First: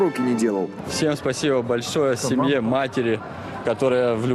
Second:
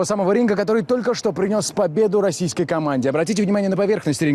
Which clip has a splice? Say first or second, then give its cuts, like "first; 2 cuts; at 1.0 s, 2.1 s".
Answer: second; 1 cut; at 1.1 s